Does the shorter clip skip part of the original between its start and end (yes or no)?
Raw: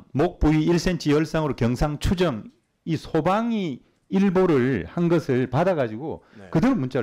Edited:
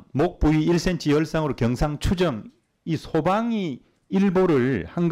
no